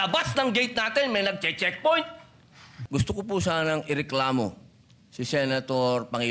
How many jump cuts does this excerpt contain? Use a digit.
1